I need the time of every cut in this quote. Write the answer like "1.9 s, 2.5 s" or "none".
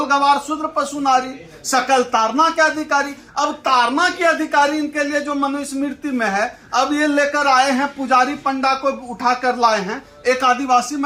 none